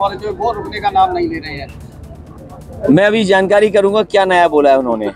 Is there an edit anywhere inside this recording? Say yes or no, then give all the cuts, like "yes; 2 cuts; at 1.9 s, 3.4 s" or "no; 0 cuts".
no; 0 cuts